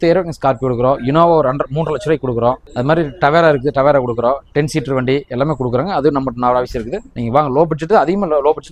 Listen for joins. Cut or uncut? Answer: uncut